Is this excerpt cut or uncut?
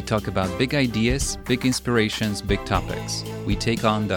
uncut